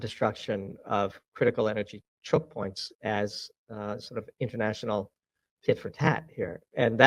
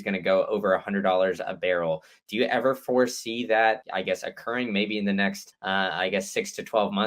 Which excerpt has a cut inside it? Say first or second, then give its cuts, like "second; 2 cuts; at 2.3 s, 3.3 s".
second; 2 cuts; at 3.8 s, 5.5 s